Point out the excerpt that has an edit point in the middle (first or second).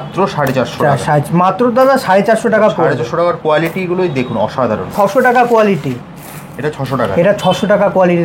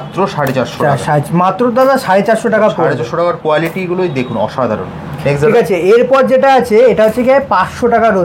first